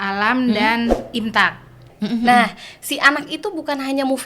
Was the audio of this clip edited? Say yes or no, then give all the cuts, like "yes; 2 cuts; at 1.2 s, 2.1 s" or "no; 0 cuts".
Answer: yes; 1 cut; at 1.9 s